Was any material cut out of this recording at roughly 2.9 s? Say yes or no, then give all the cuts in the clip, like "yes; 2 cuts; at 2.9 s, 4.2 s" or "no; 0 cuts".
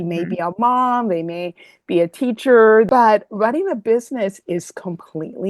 yes; 1 cut; at 2.9 s